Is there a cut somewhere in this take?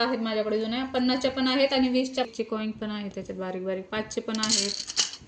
yes; 1 cut; at 2.3 s

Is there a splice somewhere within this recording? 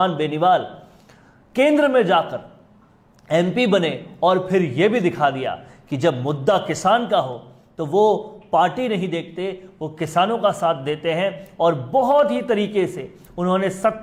no; 0 cuts

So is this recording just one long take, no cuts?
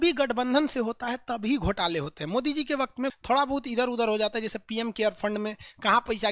no; 1 cut; at 3.2 s

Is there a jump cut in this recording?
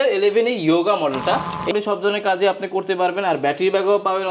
yes; 1 cut; at 1.7 s

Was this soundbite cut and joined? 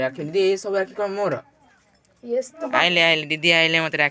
yes; 1 cut; at 2.6 s

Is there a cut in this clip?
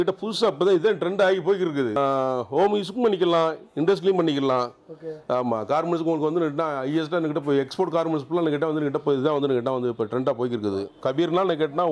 yes; 2 cuts; at 2.0 s, 10.9 s

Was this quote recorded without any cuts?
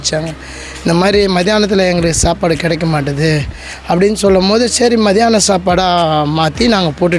yes; 0 cuts

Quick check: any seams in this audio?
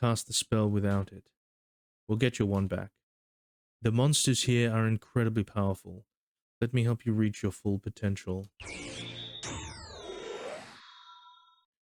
no; 0 cuts

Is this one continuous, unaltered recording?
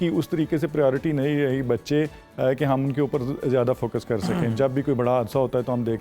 yes; 0 cuts

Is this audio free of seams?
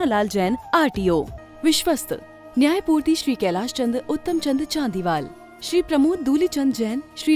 no; 1 cut; at 1.4 s

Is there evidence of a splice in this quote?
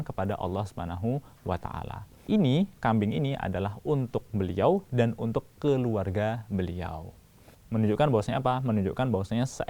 yes; 1 cut; at 2.2 s

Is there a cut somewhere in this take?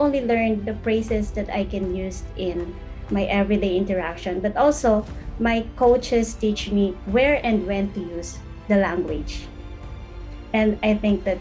no; 0 cuts

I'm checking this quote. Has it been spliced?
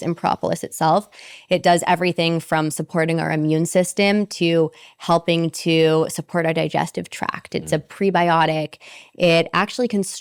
no; 0 cuts

